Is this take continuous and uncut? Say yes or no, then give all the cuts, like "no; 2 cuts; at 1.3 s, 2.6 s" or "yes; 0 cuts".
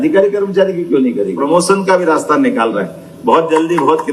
no; 1 cut; at 1.4 s